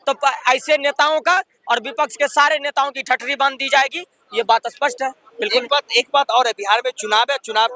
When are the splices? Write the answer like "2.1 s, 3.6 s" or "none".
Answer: none